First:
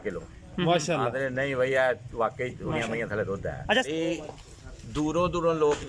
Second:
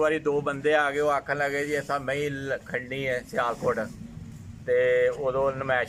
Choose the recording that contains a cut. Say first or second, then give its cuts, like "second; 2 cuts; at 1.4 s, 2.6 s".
first; 1 cut; at 3.8 s